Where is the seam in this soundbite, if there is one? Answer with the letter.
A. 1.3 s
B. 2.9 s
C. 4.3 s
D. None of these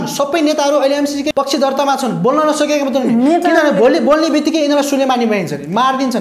A